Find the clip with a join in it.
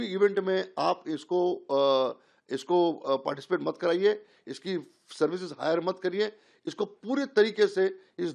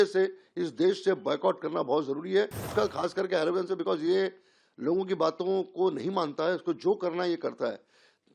second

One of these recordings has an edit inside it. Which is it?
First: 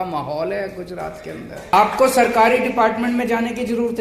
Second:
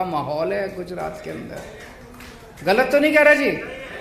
first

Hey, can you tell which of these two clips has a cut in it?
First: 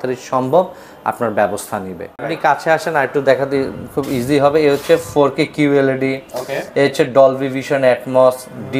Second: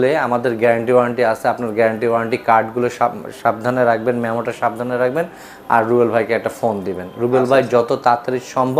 first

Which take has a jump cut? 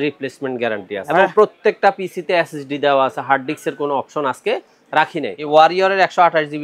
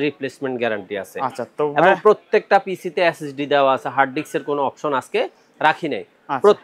first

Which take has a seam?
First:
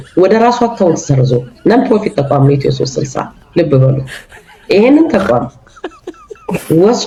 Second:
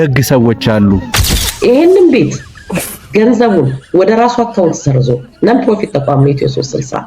second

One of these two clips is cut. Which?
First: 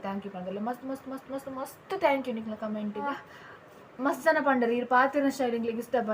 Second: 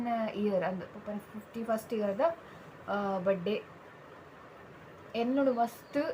first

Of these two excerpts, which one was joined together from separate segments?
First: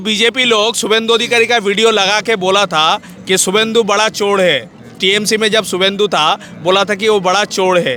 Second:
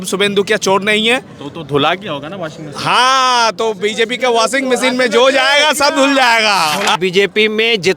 second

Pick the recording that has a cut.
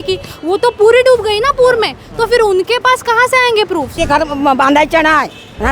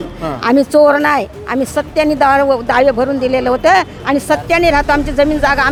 first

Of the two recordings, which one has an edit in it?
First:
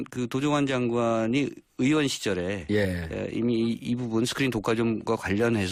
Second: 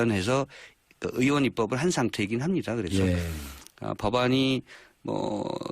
second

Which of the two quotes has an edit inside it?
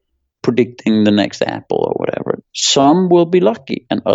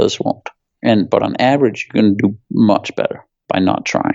first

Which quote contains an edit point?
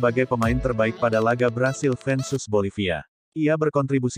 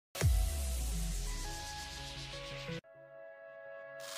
second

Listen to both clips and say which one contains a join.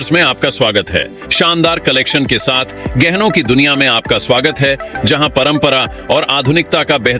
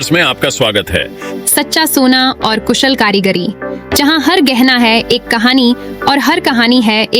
first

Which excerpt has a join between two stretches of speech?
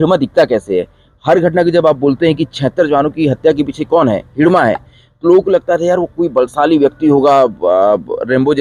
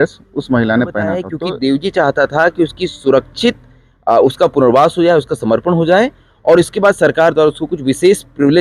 second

